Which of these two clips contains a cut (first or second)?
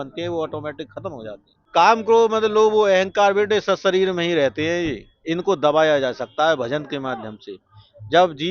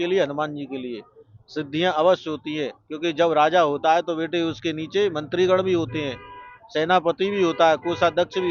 first